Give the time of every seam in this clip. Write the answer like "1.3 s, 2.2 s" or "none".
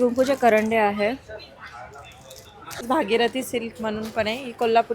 2.8 s